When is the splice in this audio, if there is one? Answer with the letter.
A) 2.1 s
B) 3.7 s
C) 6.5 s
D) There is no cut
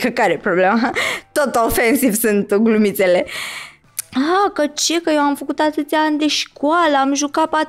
B